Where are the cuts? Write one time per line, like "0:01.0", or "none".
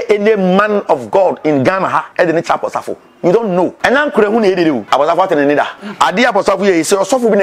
0:02.1
0:03.8
0:04.8
0:05.8